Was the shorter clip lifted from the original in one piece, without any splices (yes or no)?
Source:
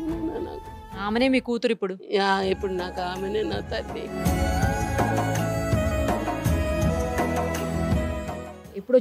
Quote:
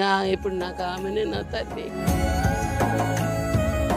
yes